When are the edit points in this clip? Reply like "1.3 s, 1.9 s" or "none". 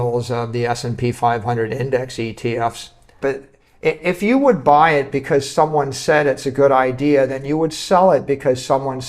3.2 s